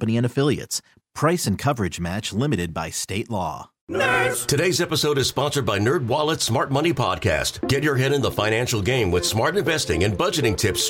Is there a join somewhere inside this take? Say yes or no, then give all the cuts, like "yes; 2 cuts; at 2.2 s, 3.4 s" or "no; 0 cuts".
yes; 1 cut; at 3.7 s